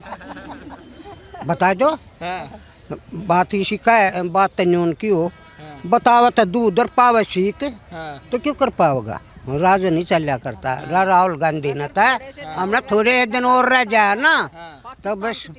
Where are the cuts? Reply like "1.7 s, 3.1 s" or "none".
none